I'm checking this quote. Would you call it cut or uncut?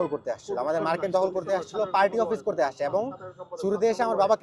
uncut